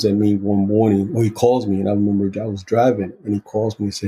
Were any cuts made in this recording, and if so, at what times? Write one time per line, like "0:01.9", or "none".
none